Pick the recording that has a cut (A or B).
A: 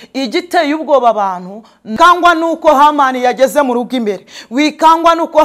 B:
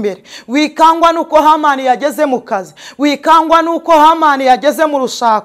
A